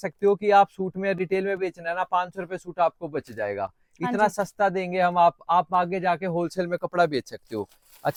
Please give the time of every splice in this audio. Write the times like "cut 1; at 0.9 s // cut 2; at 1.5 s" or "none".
none